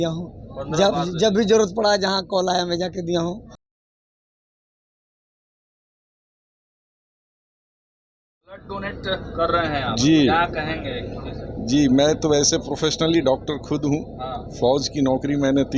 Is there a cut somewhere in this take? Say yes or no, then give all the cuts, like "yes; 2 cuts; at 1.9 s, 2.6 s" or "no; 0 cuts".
no; 0 cuts